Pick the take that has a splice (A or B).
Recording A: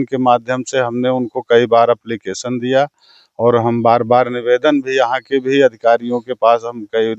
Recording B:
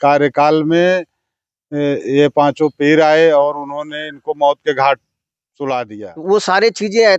B